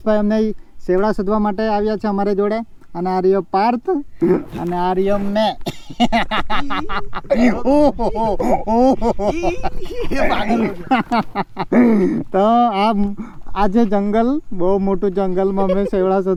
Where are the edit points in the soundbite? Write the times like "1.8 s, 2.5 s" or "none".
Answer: none